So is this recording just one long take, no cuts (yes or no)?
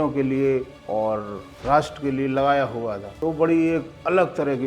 no